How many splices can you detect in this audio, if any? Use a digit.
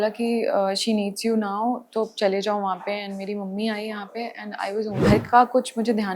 1